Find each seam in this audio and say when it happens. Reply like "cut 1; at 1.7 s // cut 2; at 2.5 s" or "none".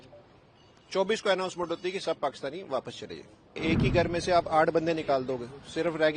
cut 1; at 3.6 s